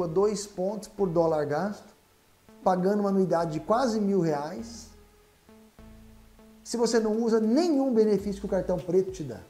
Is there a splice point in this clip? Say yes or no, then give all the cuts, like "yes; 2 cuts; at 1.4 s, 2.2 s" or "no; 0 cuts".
no; 0 cuts